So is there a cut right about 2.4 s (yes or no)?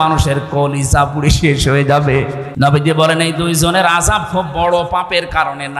yes